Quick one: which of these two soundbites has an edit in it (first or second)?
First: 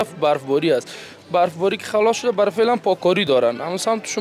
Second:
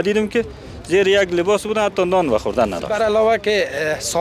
second